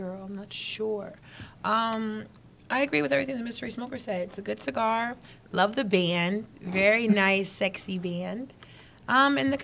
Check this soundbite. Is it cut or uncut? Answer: cut